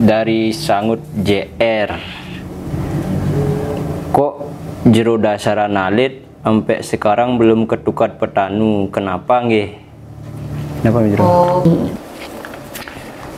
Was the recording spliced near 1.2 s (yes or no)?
no